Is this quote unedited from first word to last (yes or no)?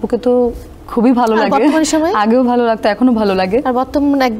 yes